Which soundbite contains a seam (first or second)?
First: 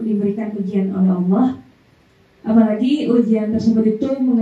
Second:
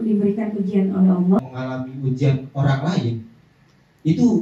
second